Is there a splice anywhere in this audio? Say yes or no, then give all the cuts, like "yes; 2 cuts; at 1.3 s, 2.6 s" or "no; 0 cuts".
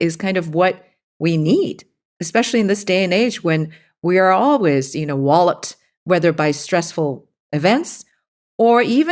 no; 0 cuts